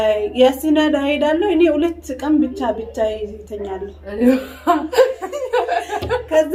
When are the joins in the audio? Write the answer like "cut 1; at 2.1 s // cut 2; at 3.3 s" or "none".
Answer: none